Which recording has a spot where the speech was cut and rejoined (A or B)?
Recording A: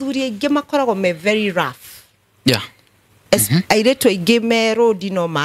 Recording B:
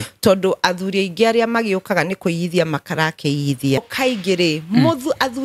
B